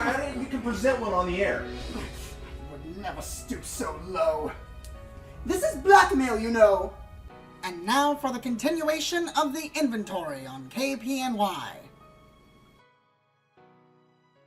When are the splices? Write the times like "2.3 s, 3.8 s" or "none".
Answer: 8.4 s